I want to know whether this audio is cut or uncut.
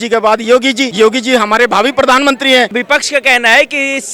cut